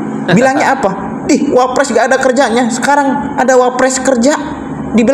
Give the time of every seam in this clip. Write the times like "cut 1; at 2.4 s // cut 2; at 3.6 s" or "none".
none